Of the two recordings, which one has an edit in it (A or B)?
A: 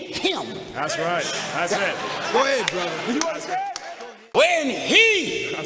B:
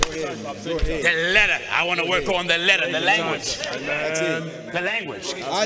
A